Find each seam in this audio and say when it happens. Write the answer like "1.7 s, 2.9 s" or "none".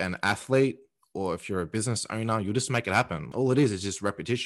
3.3 s